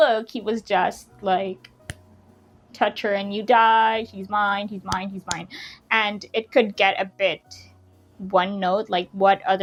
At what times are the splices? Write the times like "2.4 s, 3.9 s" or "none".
none